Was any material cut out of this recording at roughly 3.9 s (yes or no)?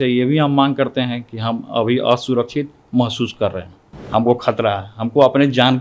yes